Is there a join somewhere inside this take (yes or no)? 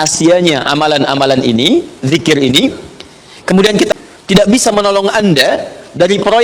yes